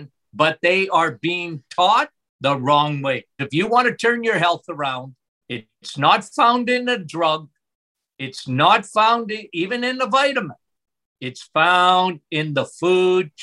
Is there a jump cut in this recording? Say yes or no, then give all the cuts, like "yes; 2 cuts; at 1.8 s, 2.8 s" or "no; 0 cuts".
yes; 2 cuts; at 2.2 s, 3.4 s